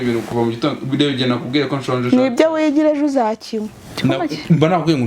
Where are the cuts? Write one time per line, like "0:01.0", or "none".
0:03.8